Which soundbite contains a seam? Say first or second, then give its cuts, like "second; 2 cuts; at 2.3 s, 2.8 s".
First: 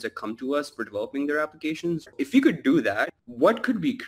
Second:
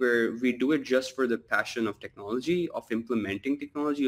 first; 2 cuts; at 2.1 s, 3.2 s